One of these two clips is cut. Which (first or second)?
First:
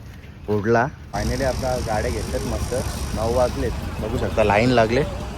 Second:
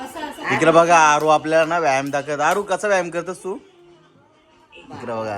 first